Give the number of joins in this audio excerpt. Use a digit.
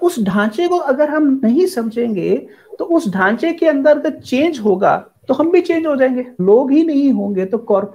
1